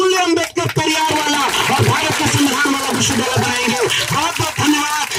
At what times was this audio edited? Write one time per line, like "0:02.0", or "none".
none